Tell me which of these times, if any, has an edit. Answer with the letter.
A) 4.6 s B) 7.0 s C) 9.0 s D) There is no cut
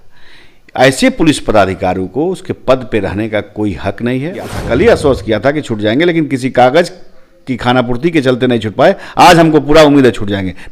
A